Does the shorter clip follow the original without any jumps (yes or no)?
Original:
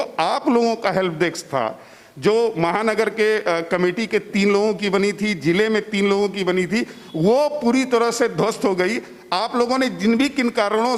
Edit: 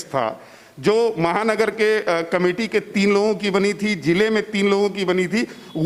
yes